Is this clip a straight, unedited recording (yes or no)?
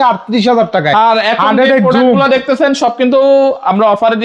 yes